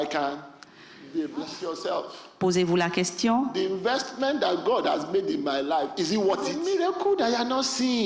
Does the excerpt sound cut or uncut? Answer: cut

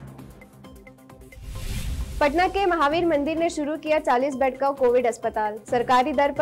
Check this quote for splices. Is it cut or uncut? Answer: cut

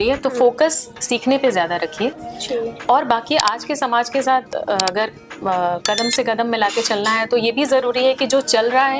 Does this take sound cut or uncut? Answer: uncut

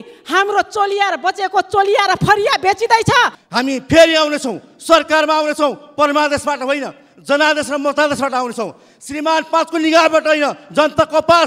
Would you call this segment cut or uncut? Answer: cut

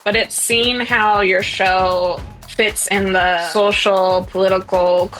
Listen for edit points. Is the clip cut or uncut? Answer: cut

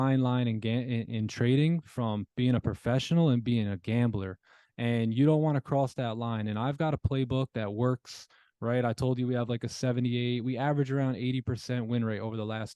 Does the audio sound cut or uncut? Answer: uncut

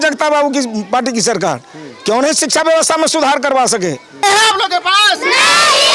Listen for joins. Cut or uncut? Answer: cut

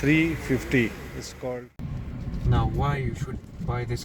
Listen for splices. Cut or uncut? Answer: cut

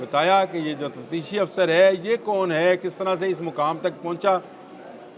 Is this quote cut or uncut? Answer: uncut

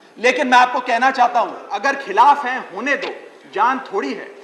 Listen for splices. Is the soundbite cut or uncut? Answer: cut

